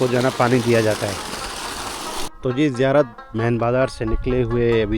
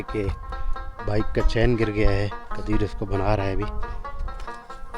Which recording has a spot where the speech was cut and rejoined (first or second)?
first